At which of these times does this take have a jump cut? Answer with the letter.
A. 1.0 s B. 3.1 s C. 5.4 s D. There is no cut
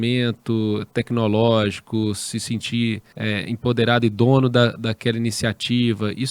B